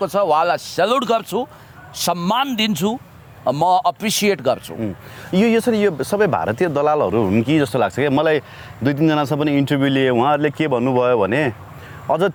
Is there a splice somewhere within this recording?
no; 0 cuts

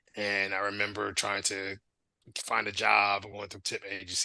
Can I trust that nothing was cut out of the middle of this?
no; 1 cut; at 1.9 s

